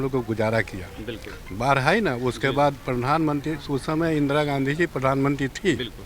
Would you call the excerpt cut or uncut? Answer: uncut